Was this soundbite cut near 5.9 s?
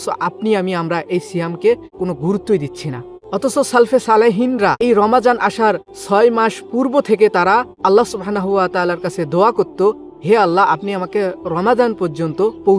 yes; 5 cuts; at 1.9 s, 3.1 s, 4.8 s, 5.9 s, 7.7 s

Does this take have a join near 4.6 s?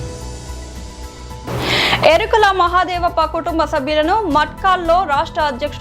no; 1 cut; at 1.4 s

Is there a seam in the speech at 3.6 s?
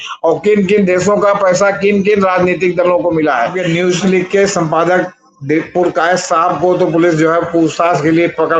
yes; 1 cut; at 3.6 s

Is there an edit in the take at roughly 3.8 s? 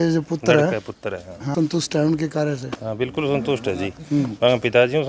no; 1 cut; at 1.5 s

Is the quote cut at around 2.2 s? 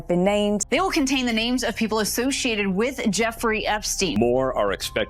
no; 1 cut; at 4.1 s

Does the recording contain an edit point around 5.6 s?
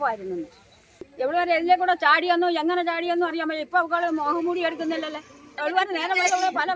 yes; 2 cuts; at 1.1 s, 5.6 s

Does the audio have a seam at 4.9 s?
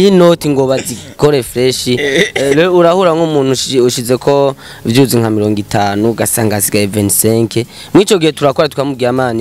no; 0 cuts

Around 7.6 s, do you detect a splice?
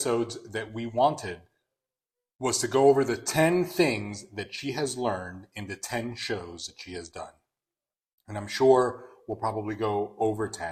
no; 0 cuts

